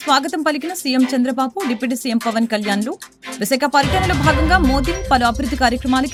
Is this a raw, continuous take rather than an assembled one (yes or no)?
yes